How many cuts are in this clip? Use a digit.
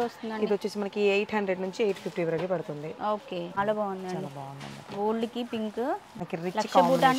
2